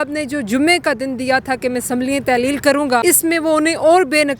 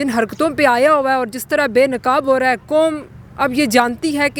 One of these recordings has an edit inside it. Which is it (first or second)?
first